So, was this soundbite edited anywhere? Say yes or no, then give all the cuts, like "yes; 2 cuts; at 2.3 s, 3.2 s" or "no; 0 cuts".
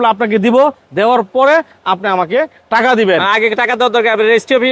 no; 0 cuts